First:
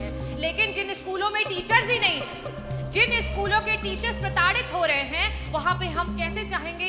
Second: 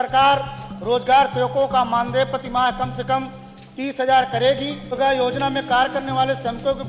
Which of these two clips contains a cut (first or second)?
second